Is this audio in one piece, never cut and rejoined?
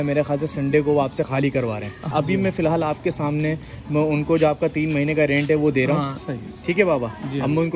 no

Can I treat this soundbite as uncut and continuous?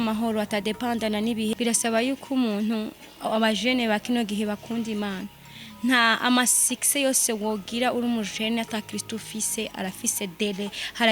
no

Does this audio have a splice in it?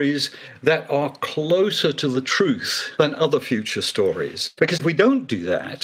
yes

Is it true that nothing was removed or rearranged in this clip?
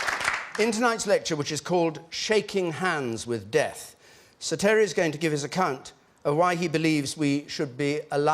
no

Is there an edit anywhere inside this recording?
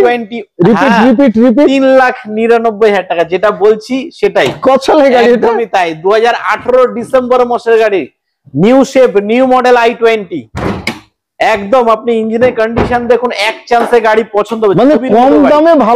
no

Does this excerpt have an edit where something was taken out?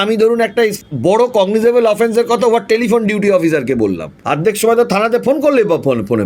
yes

